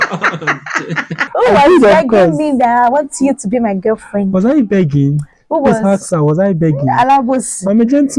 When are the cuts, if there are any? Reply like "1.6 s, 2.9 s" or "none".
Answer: 1.3 s